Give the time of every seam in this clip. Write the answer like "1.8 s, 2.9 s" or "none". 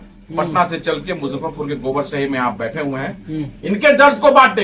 none